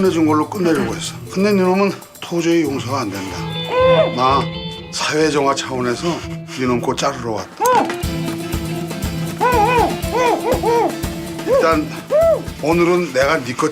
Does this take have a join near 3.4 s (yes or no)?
yes